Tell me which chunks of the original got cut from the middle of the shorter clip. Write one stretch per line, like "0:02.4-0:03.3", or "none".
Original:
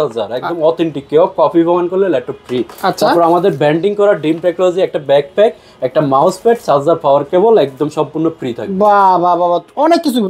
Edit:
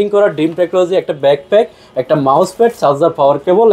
none